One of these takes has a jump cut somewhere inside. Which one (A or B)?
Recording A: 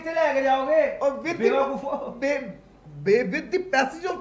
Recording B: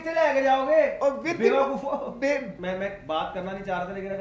B